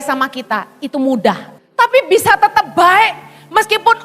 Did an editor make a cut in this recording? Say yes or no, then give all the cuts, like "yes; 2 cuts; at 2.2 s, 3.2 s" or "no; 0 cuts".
yes; 1 cut; at 1.5 s